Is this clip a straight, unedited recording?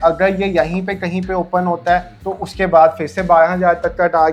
yes; 0 cuts

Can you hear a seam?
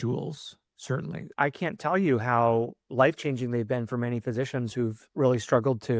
no; 0 cuts

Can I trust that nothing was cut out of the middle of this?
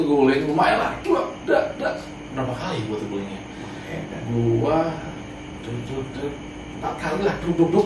yes; 0 cuts

